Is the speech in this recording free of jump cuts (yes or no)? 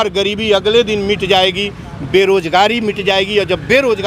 yes